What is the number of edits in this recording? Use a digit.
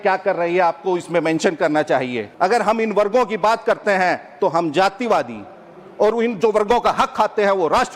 1